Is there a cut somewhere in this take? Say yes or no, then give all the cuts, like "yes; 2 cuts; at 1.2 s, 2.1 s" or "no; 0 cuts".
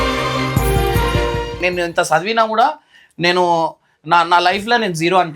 yes; 1 cut; at 1.5 s